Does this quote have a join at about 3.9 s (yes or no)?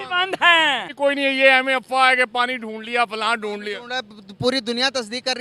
no